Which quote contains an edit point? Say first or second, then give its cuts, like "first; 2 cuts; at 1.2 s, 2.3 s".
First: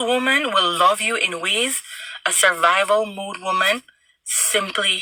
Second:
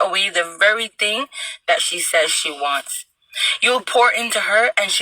second; 1 cut; at 3.0 s